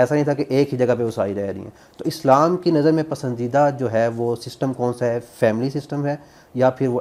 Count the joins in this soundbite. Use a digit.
0